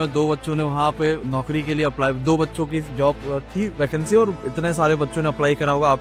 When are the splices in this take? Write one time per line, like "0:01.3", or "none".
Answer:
none